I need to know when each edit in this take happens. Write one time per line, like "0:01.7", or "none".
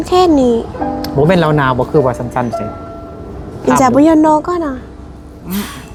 none